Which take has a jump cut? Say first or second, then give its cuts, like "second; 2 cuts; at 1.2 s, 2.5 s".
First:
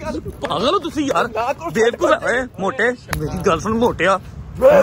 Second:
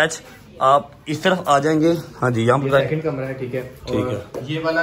first; 1 cut; at 3.1 s